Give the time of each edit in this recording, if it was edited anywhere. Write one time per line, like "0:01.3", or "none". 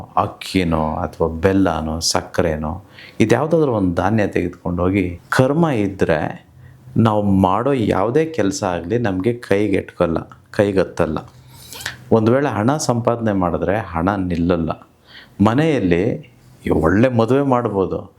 0:05.2